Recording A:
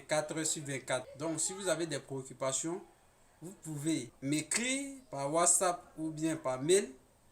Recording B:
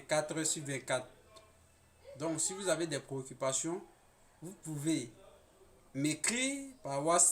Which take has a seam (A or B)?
A